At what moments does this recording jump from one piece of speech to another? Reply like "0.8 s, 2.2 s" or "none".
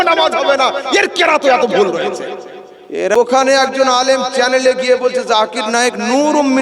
3.1 s